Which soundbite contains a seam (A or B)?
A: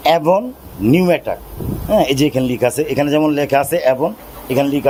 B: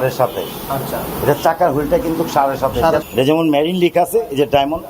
B